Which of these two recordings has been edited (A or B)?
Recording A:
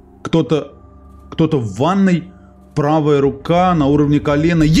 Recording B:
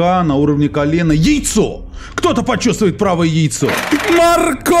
B